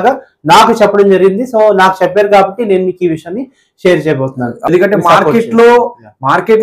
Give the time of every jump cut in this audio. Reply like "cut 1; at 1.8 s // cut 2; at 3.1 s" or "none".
cut 1; at 4.7 s